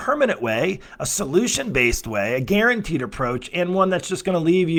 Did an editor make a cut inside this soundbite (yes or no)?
no